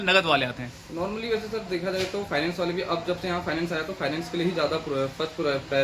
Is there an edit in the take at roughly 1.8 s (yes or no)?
no